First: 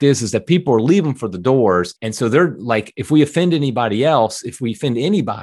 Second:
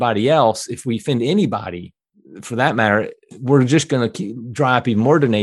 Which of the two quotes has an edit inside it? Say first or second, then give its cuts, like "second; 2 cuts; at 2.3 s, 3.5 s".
first; 1 cut; at 2.0 s